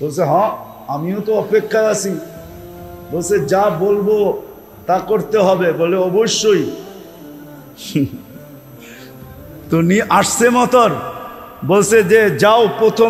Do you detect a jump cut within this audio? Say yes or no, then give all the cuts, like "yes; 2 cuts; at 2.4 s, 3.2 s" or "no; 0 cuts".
yes; 2 cuts; at 8.3 s, 9.7 s